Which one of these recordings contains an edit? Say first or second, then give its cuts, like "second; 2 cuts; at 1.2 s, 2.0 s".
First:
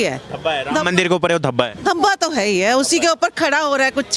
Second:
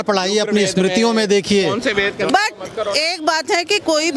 second; 1 cut; at 2.3 s